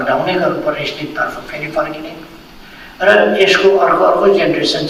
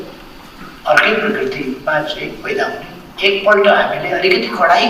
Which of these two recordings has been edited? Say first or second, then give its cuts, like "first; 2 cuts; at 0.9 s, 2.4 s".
second; 1 cut; at 3.1 s